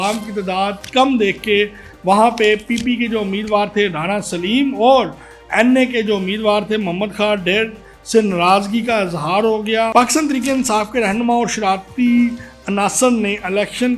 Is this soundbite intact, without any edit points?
no; 1 cut; at 9.9 s

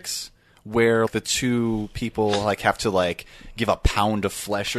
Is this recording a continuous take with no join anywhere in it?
no; 1 cut; at 1.1 s

